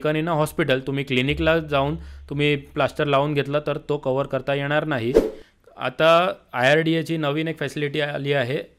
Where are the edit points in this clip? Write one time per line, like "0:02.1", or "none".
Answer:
0:05.4

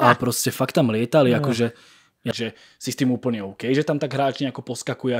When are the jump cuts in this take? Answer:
0:02.4

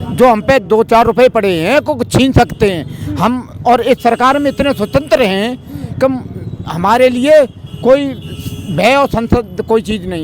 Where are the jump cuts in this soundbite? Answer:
none

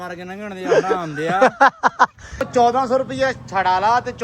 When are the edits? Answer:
0:02.5

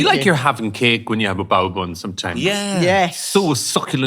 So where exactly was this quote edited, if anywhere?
none

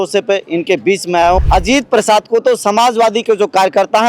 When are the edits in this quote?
0:01.4

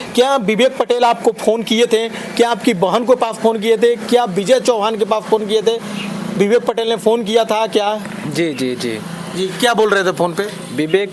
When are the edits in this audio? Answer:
none

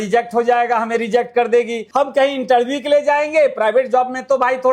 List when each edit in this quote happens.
none

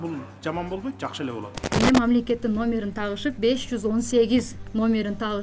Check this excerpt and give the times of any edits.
0:01.8

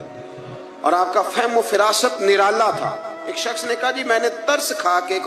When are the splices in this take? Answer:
none

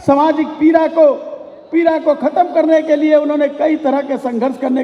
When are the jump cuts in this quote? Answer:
none

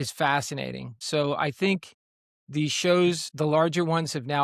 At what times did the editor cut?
none

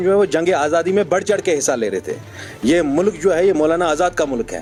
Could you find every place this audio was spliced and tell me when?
none

